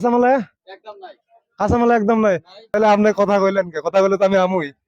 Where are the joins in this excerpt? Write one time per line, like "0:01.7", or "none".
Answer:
0:02.5